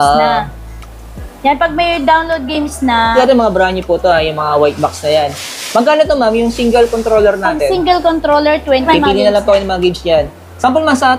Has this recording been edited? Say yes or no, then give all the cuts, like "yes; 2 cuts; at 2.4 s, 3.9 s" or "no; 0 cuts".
yes; 2 cuts; at 3.1 s, 8.9 s